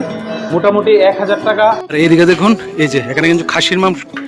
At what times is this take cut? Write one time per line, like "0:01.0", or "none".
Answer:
0:01.8